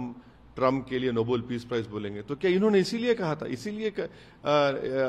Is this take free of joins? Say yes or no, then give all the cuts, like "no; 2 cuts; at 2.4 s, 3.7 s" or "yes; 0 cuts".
yes; 0 cuts